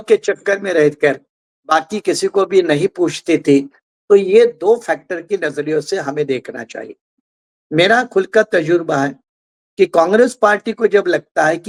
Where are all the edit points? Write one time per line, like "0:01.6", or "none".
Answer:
none